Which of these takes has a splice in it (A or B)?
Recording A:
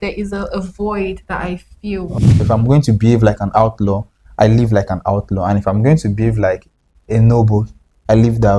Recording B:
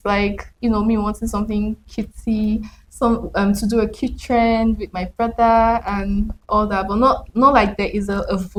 A